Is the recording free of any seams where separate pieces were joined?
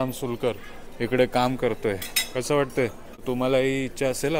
no; 1 cut; at 3.2 s

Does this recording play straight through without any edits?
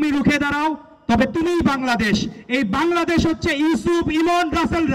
yes; 0 cuts

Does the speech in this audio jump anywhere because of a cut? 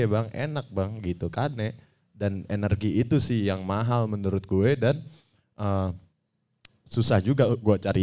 no; 0 cuts

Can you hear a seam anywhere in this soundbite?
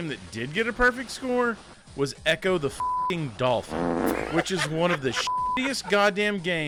no; 0 cuts

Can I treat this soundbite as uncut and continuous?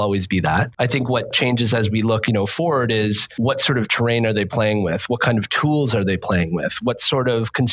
no; 3 cuts; at 1.2 s, 2.2 s, 3.3 s

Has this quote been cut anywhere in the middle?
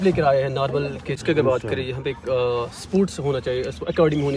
yes; 1 cut; at 1.2 s

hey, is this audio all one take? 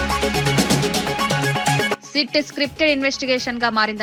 yes; 0 cuts

